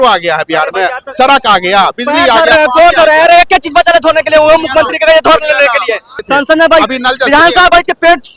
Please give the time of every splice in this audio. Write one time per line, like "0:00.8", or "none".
0:06.1